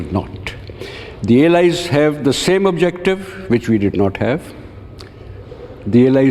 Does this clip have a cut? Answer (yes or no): no